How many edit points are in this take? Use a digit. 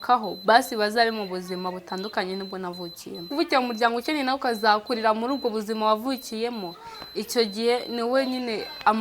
1